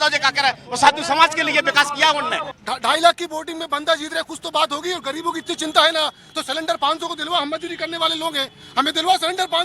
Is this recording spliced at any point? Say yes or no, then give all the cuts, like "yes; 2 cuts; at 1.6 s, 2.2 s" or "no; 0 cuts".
yes; 1 cut; at 2.4 s